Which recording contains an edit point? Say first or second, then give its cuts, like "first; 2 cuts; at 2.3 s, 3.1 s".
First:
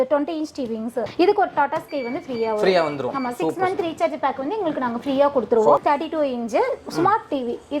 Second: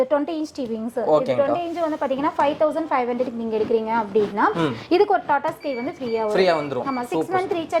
first; 2 cuts; at 1.0 s, 5.8 s